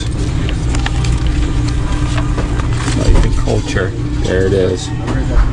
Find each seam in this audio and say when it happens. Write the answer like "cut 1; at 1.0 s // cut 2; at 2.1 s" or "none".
cut 1; at 1.0 s